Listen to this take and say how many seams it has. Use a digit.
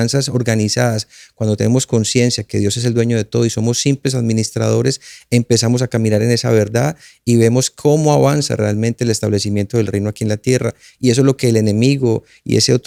0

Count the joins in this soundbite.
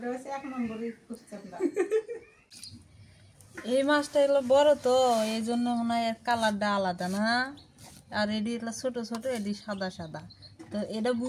1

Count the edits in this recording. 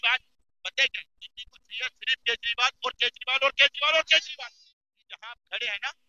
1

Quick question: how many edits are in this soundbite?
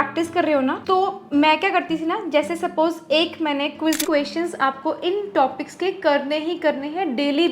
1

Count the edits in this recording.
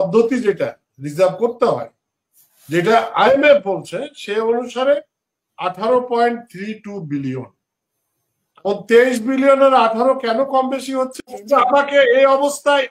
1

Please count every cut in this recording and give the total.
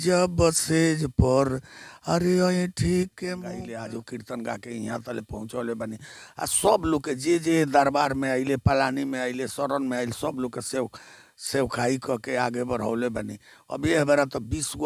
1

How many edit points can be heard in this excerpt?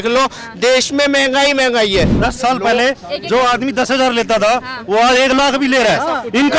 1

